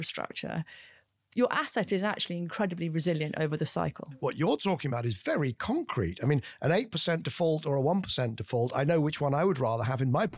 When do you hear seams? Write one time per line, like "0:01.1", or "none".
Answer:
0:04.1